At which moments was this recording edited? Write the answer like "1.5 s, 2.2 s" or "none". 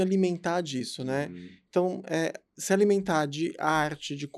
none

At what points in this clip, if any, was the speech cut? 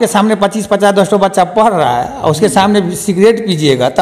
none

